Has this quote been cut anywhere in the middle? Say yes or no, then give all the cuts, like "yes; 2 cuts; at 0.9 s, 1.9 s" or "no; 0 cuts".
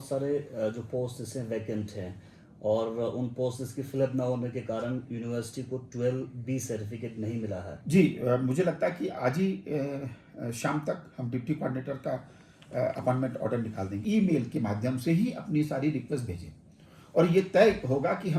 yes; 2 cuts; at 7.8 s, 14.0 s